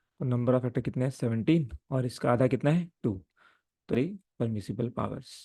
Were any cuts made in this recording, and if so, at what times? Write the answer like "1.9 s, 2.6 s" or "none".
3.9 s

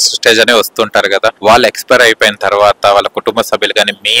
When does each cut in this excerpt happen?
1.4 s

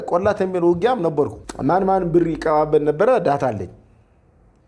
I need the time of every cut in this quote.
1.4 s

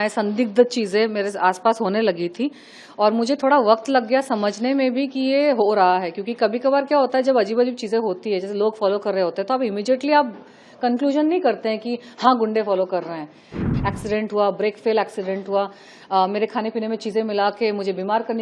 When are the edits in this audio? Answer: 13.5 s

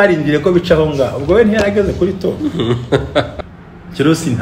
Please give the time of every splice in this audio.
3.3 s

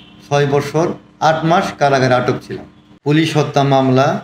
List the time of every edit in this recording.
2.9 s

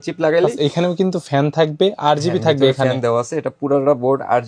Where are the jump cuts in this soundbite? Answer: none

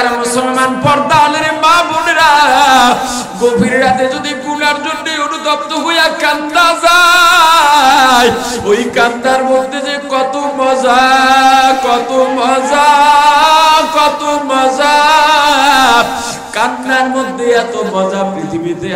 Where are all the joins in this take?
none

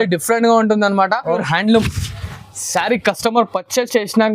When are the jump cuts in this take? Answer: 1.4 s

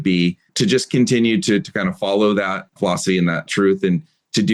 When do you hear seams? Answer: 3.1 s

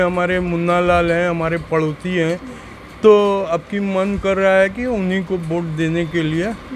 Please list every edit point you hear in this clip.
none

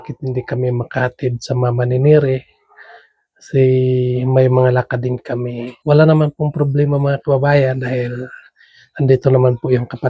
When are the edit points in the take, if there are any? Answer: 5.7 s

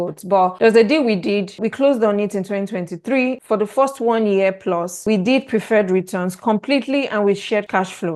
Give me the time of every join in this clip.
none

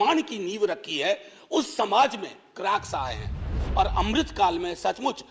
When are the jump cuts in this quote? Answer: 3.6 s

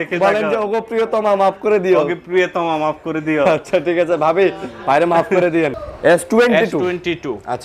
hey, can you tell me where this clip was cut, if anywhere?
5.8 s

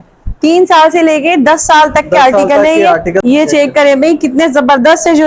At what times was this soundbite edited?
3.2 s

